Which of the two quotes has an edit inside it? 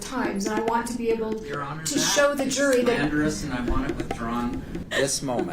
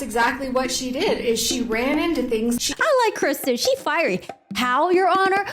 second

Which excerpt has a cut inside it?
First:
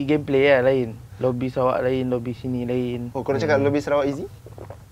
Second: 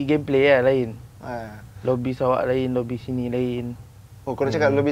first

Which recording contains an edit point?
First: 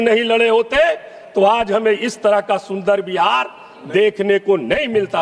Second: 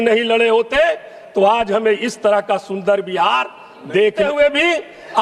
second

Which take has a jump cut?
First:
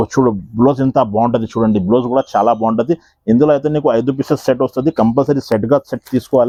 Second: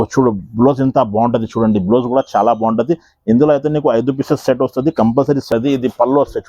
second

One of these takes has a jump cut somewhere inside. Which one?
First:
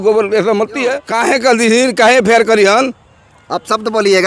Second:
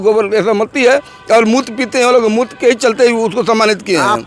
first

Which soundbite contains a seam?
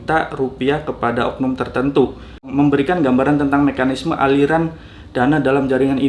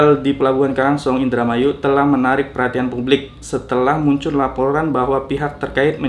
first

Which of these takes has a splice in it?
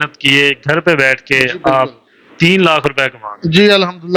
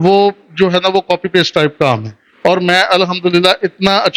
second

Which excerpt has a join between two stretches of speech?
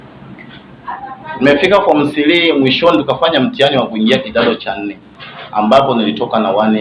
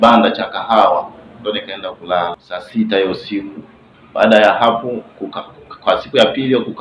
second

